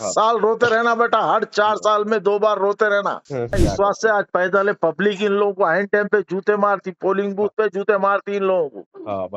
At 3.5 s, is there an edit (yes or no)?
yes